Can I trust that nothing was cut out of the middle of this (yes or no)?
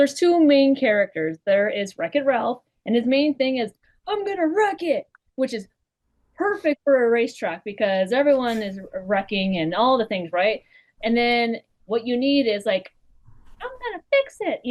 yes